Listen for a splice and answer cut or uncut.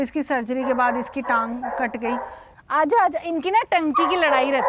cut